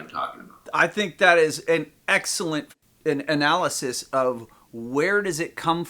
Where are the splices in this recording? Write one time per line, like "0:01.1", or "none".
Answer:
0:02.7